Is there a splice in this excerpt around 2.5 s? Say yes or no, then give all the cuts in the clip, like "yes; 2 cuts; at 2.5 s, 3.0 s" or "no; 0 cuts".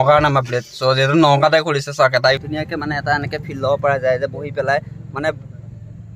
yes; 1 cut; at 2.5 s